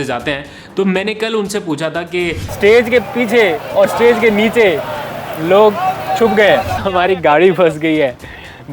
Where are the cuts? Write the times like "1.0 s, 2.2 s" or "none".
2.4 s, 6.8 s